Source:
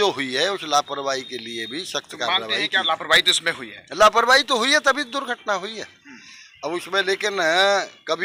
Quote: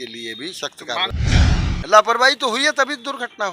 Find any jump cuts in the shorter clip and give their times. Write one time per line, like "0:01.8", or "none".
0:01.4